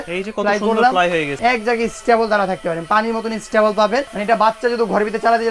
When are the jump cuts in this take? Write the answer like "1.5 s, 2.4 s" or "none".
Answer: 1.3 s, 4.1 s